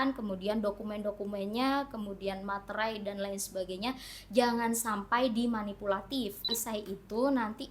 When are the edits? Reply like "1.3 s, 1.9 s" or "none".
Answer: 6.5 s